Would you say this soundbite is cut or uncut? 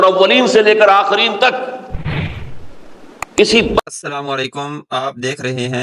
cut